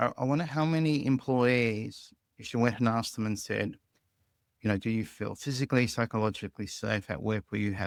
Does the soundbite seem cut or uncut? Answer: uncut